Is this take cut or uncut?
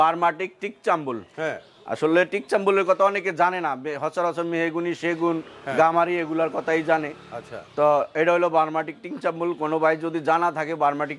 uncut